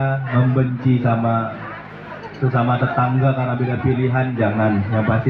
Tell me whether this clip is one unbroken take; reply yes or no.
yes